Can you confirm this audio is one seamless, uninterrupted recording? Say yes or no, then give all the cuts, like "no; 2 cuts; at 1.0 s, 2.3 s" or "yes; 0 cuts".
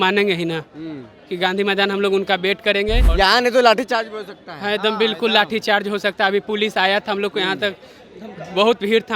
no; 1 cut; at 3.0 s